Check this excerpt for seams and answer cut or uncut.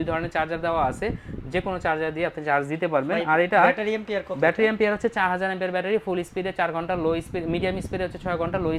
uncut